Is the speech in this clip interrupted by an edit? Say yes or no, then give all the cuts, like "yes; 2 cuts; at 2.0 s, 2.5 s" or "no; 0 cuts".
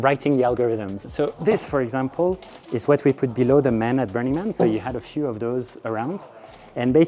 yes; 1 cut; at 1.0 s